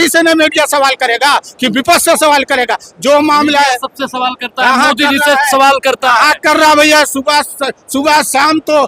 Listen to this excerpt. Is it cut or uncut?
uncut